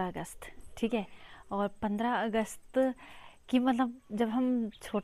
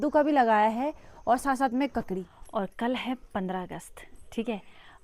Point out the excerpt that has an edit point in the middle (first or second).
second